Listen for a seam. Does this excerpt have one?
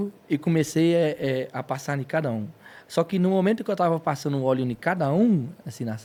no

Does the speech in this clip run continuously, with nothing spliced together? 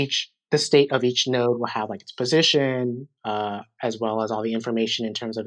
yes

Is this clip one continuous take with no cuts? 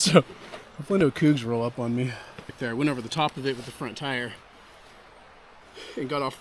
yes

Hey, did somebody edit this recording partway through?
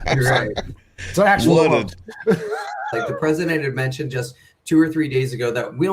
yes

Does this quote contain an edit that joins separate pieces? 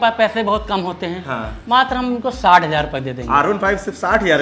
no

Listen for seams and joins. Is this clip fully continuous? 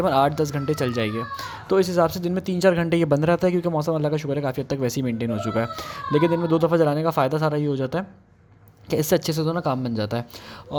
yes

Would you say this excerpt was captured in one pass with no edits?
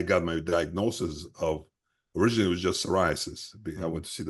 yes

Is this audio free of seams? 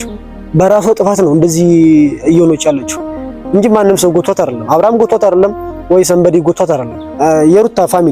no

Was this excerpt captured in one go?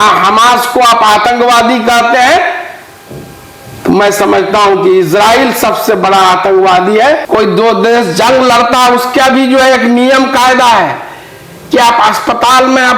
no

